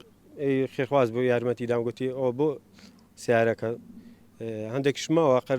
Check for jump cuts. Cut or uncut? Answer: uncut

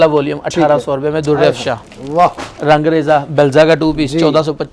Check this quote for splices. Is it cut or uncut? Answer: cut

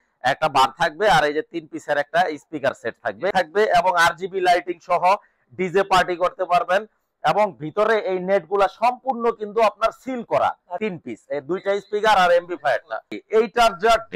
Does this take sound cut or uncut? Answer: cut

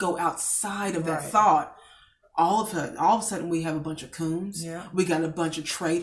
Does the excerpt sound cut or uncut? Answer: uncut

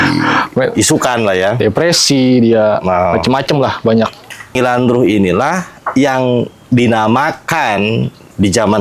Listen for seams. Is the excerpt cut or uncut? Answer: cut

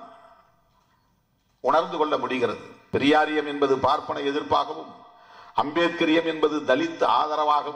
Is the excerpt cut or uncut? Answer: cut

